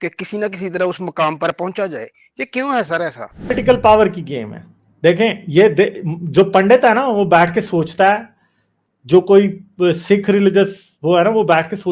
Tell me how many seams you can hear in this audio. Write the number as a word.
one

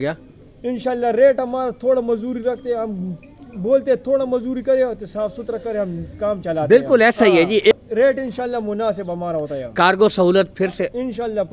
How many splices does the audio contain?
one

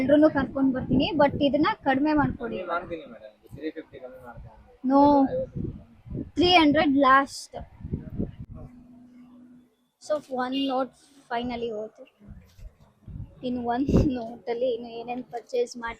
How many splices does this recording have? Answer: one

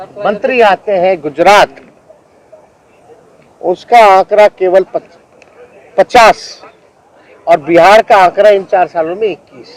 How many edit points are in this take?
zero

